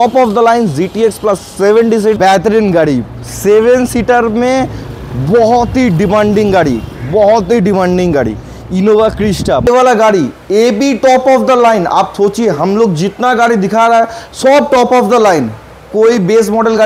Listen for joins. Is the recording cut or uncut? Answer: cut